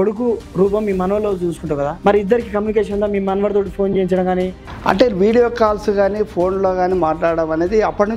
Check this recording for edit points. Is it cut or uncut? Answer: cut